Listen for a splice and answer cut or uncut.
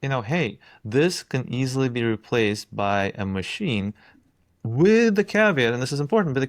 uncut